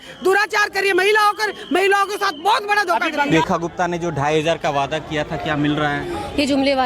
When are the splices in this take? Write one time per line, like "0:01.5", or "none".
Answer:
0:03.3